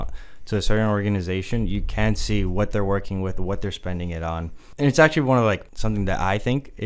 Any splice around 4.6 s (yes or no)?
yes